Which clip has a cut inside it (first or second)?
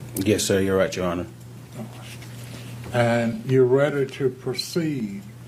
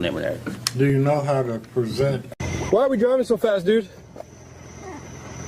second